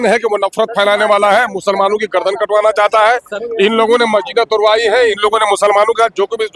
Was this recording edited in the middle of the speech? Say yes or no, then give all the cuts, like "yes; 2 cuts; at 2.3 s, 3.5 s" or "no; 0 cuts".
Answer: no; 0 cuts